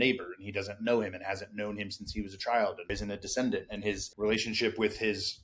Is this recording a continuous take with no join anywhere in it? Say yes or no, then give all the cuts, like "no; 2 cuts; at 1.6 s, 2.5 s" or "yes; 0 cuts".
no; 2 cuts; at 2.9 s, 4.1 s